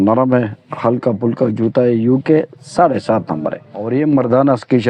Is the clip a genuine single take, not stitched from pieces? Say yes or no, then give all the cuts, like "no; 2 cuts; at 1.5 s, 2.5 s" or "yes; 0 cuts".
no; 1 cut; at 3.9 s